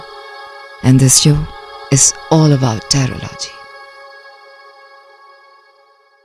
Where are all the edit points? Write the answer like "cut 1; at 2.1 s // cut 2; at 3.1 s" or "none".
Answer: none